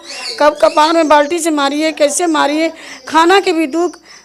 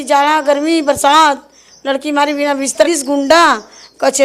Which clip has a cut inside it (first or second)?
second